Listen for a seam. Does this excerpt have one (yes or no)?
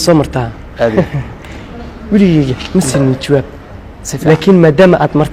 no